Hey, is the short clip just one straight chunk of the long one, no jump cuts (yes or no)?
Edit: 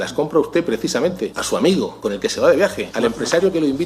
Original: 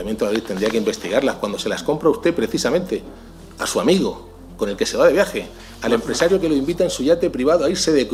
no